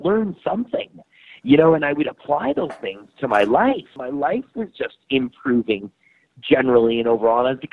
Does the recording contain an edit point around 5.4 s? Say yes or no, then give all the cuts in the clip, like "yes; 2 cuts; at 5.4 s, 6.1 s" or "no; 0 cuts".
no; 1 cut; at 4.0 s